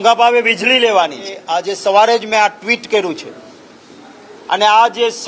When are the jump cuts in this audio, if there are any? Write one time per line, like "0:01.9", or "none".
0:01.5